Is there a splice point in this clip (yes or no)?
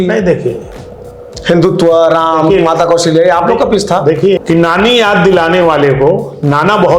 yes